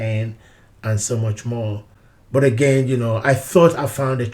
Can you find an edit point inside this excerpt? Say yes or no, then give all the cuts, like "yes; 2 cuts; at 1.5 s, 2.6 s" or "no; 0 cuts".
no; 0 cuts